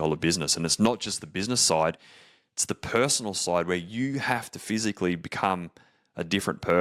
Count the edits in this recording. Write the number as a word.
zero